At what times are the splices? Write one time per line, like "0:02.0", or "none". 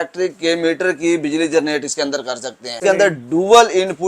0:02.8